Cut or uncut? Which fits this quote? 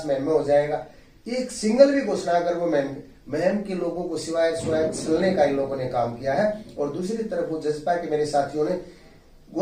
uncut